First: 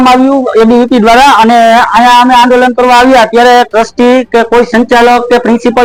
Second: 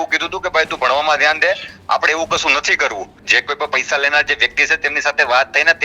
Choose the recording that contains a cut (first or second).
second